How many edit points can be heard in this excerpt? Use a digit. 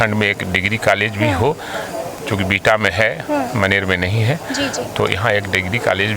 0